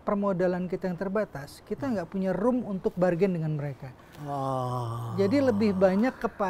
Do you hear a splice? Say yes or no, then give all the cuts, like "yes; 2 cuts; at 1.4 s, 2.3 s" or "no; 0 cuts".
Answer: no; 0 cuts